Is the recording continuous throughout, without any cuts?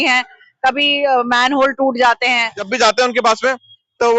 no; 1 cut; at 2.6 s

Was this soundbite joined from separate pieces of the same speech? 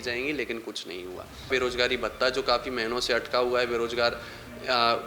yes; 1 cut; at 1.5 s

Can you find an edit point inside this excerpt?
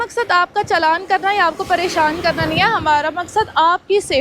no; 0 cuts

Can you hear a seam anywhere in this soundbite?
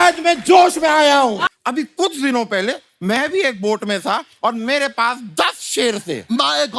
yes; 1 cut; at 1.4 s

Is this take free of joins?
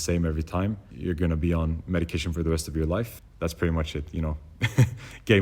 no; 2 cuts; at 0.9 s, 3.2 s

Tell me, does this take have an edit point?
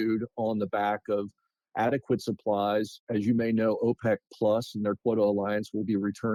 no; 0 cuts

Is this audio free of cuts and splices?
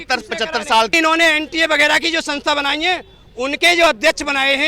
no; 1 cut; at 0.9 s

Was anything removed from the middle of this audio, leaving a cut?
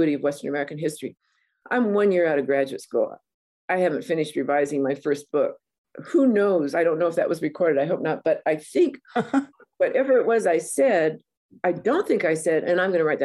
no; 0 cuts

